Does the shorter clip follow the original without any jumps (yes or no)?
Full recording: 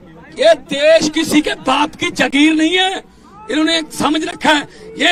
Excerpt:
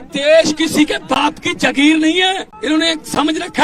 no